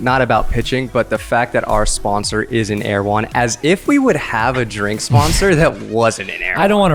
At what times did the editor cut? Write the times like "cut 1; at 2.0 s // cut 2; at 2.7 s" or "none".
none